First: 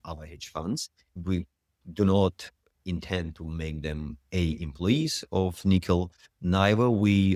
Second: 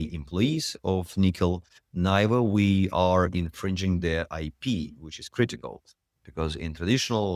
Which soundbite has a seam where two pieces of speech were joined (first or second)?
first